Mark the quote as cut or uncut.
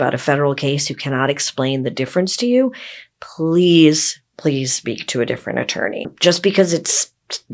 cut